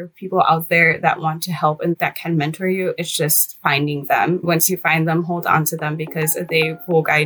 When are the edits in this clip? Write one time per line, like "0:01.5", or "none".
0:01.0
0:04.4